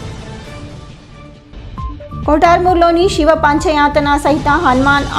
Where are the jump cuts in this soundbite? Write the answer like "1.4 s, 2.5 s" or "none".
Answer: none